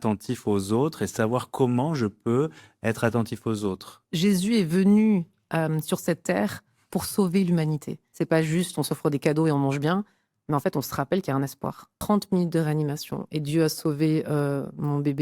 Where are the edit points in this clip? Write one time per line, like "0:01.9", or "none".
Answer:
0:03.9
0:08.0
0:11.9